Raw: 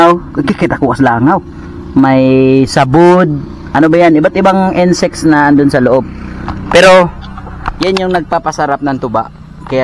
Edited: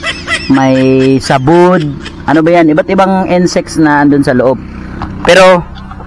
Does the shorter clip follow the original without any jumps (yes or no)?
yes